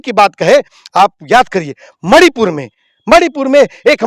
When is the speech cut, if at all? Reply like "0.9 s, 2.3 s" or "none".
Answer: none